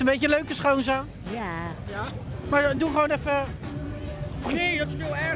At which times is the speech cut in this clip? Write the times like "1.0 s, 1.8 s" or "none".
2.3 s